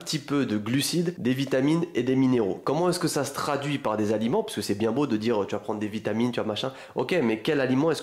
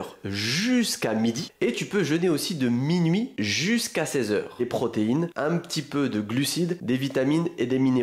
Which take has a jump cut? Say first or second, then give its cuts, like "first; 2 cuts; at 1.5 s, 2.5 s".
second; 1 cut; at 4.5 s